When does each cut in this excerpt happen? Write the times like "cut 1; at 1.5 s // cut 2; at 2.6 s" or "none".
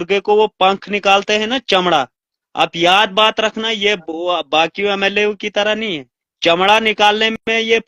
none